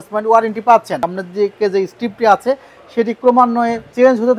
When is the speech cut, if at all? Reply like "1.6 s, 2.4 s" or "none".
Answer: 1.0 s